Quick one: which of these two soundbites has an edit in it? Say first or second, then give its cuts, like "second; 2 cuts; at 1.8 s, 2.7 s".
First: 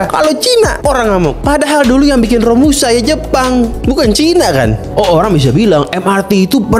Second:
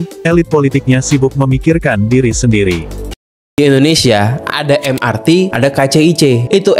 second; 1 cut; at 3.6 s